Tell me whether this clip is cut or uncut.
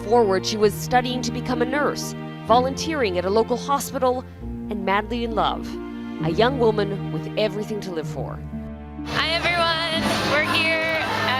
cut